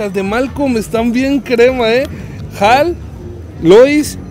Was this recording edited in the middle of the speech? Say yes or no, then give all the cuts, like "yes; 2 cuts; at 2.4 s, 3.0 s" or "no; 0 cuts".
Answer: no; 0 cuts